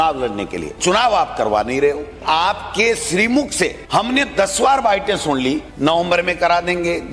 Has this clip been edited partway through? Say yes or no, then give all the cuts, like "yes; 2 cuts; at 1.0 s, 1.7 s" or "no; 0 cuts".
yes; 4 cuts; at 0.8 s, 2.2 s, 3.8 s, 5.7 s